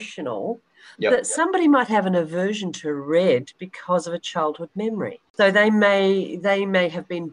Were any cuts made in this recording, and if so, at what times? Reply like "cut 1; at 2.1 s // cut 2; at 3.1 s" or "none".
cut 1; at 5.2 s